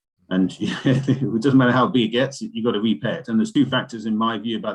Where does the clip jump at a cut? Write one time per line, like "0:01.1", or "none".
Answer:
0:03.5